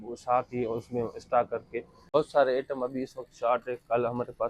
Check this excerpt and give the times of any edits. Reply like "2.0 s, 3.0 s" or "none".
2.0 s